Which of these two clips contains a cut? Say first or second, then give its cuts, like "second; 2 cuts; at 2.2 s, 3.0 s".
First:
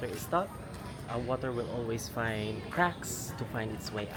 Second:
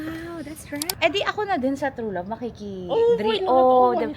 second; 1 cut; at 0.9 s